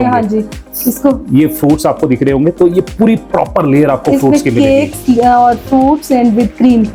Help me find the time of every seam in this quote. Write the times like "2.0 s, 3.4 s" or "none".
none